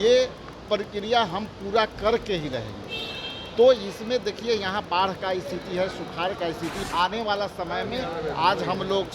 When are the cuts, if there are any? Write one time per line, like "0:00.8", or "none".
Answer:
0:06.7